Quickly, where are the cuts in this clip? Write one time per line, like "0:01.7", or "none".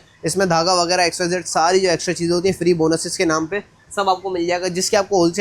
none